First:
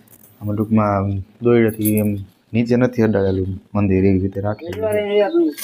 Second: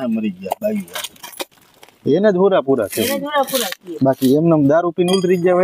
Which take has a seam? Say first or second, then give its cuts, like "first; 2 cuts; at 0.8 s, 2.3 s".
first; 1 cut; at 4.7 s